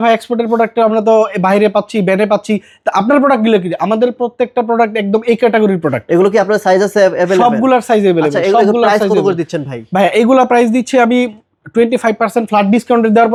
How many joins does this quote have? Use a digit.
0